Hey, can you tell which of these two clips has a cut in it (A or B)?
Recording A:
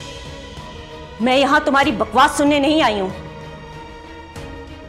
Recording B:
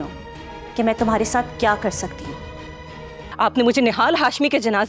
B